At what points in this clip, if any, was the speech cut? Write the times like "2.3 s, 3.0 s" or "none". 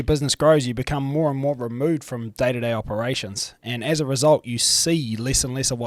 none